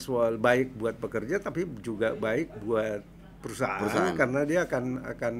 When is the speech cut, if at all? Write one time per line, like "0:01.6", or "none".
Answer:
none

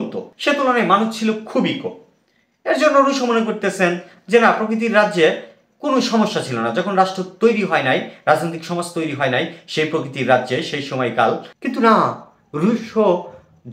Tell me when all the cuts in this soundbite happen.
0:11.5

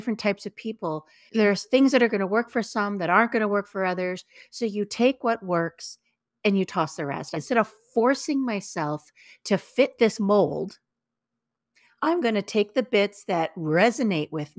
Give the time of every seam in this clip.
0:01.2
0:07.4

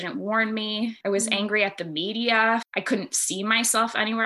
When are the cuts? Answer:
0:01.0
0:02.7

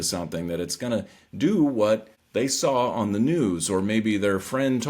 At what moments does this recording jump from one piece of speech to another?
0:02.2

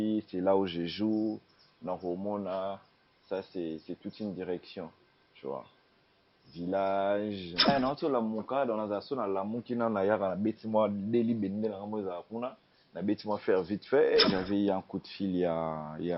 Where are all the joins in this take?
0:07.7
0:14.3

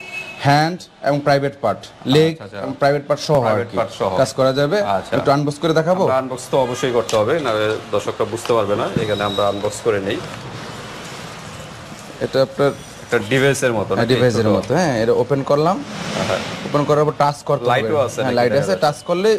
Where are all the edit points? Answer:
none

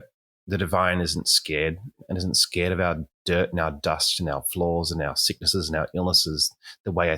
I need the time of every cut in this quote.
0:02.0

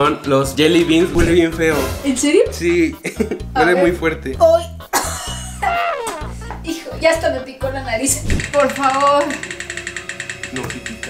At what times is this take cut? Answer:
0:01.1
0:08.3

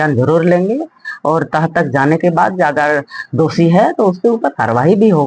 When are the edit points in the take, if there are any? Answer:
none

